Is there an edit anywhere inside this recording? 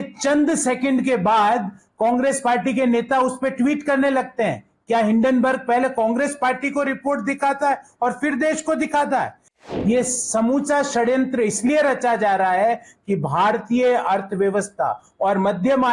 yes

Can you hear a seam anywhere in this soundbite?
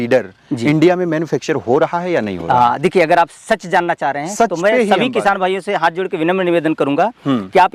no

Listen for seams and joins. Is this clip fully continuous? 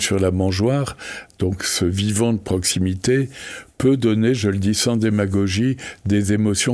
yes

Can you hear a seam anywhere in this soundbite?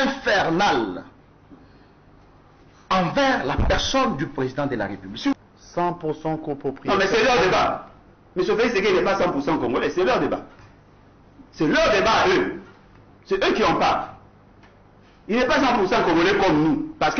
yes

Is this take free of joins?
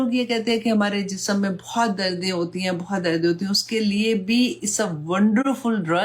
yes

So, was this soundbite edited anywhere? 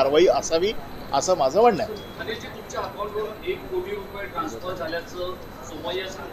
no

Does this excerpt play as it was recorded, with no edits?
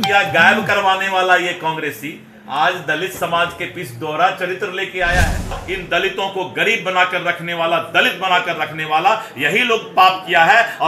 no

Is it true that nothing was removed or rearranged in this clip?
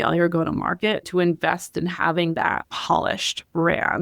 no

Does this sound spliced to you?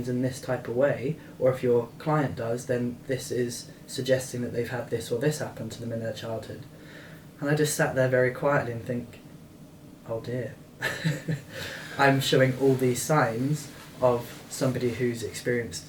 no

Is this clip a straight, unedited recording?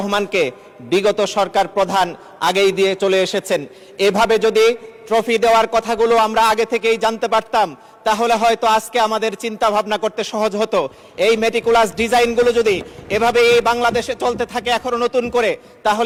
yes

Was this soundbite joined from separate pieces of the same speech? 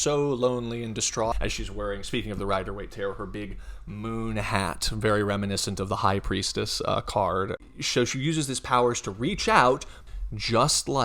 yes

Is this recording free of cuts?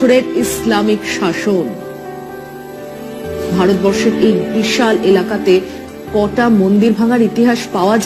yes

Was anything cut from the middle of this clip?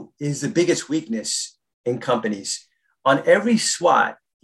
no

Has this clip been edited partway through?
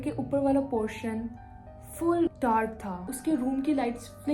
yes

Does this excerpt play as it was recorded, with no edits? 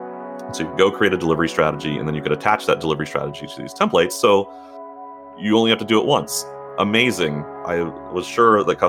no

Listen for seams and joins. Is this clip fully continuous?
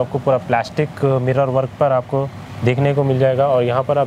yes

